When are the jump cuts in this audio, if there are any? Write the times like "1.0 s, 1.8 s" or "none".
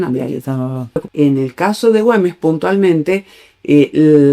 1.1 s